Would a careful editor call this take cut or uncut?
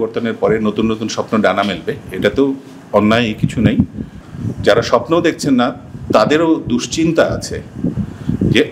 cut